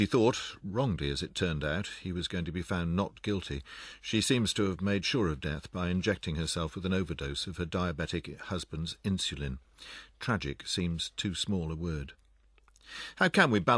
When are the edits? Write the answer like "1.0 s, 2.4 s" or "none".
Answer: none